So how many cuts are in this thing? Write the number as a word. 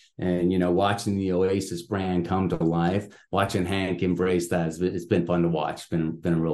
one